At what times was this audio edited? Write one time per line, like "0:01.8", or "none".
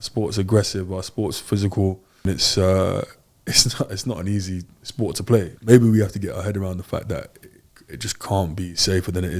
0:02.2
0:05.5